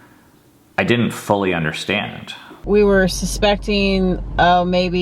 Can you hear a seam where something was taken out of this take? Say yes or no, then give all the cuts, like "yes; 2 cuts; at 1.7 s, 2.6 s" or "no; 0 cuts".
yes; 1 cut; at 2.6 s